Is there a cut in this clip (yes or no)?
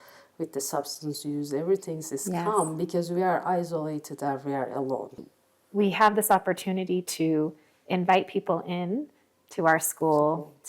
yes